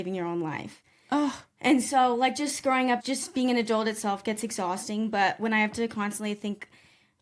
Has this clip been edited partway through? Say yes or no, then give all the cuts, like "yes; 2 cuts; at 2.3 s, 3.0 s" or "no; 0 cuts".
yes; 1 cut; at 3.0 s